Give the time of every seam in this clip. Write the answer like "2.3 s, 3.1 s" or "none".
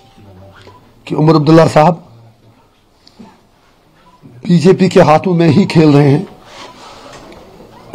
none